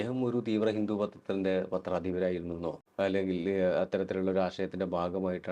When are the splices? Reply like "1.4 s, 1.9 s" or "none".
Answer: 2.8 s